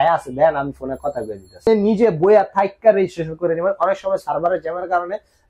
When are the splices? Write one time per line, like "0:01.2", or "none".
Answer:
0:01.7